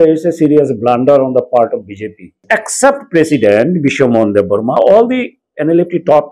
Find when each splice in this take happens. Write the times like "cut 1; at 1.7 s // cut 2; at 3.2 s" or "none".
cut 1; at 2.4 s